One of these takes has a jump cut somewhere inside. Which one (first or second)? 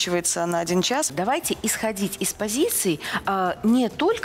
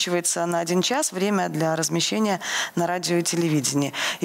first